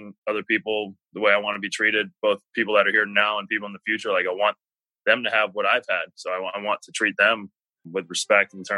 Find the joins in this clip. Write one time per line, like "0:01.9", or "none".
0:07.9